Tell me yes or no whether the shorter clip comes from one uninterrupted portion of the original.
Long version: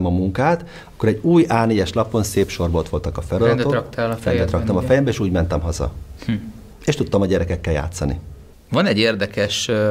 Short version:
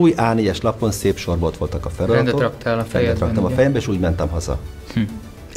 yes